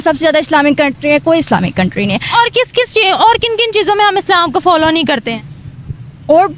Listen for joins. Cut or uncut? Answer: uncut